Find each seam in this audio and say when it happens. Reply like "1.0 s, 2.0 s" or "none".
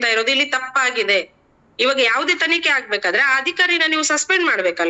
none